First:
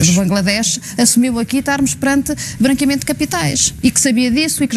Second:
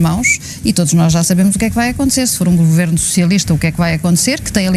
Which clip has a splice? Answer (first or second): first